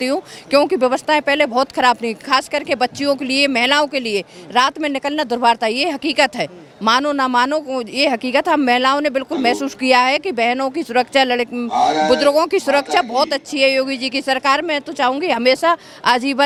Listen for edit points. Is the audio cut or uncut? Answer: uncut